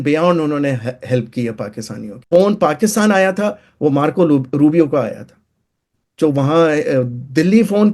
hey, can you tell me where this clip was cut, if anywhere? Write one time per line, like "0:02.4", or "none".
0:02.1